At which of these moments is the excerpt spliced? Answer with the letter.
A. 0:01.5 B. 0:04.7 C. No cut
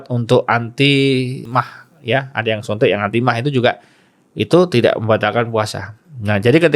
A